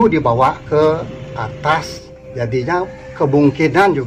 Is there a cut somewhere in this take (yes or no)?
yes